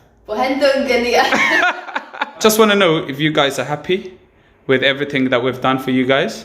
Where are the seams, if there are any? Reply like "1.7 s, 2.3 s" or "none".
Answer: 2.3 s